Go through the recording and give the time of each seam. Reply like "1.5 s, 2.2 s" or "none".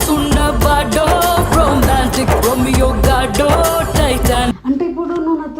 4.6 s